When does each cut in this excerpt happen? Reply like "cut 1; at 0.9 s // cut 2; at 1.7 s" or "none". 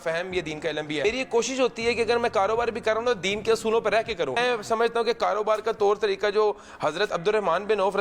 cut 1; at 1.0 s // cut 2; at 4.4 s